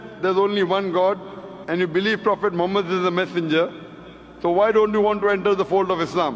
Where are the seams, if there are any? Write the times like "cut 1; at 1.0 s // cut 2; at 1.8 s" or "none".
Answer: none